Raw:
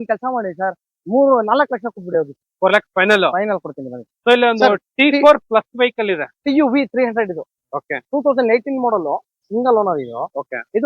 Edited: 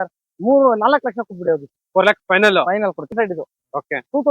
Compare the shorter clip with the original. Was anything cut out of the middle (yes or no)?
yes